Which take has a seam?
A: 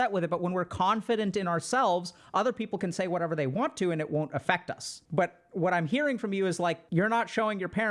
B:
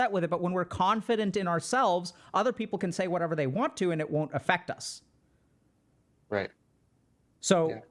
A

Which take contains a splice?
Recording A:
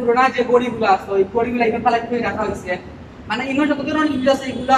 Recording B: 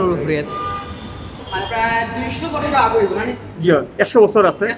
B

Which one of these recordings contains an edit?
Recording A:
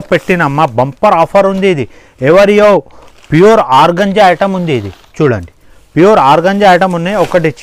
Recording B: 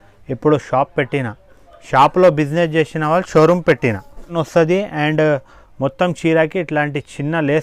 B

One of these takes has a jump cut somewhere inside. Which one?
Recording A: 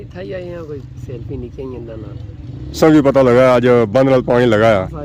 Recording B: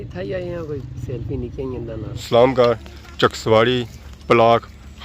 B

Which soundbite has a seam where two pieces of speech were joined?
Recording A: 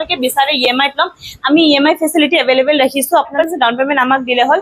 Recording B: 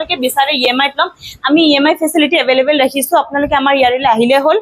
A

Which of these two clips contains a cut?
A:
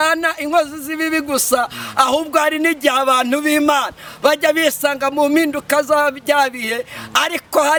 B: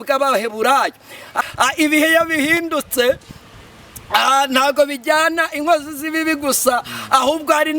B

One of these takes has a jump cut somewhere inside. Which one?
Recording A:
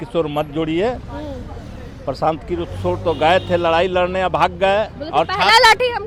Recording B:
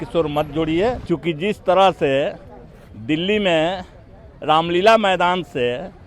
B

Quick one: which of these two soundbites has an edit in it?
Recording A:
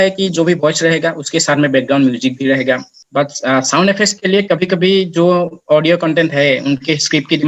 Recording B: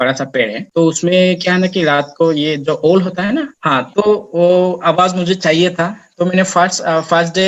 A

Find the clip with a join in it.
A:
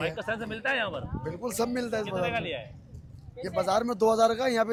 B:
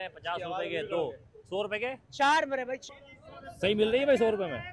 B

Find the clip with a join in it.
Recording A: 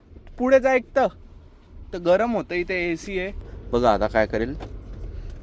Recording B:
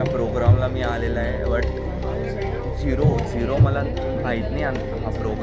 A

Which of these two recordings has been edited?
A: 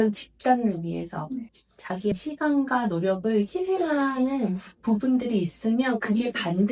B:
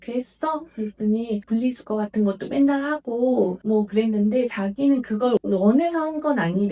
B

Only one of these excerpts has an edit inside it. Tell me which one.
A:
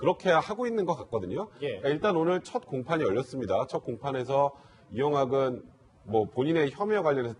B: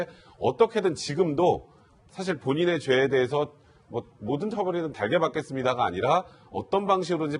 A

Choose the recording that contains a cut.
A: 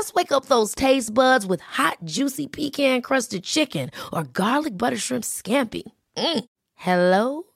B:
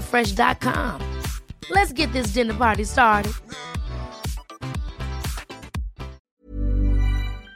B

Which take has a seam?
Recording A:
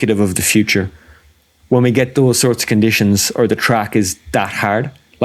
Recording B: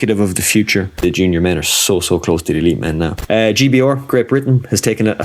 B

